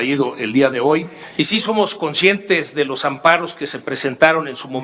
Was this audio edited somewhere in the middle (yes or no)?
yes